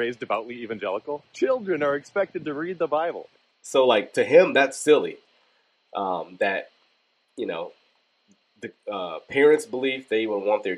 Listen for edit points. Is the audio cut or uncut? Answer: uncut